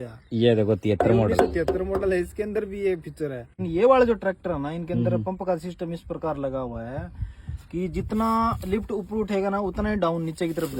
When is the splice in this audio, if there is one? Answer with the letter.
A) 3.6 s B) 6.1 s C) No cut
A